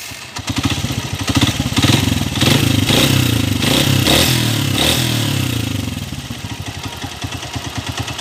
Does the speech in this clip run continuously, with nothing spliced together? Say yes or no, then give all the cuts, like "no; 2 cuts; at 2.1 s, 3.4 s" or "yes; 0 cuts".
yes; 0 cuts